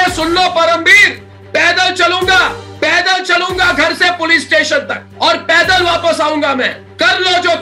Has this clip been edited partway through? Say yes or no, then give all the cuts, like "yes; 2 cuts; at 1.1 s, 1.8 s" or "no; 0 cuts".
no; 0 cuts